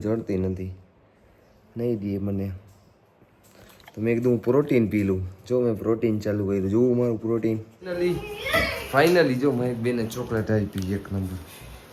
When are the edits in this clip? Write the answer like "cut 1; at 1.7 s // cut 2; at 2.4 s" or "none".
cut 1; at 8.0 s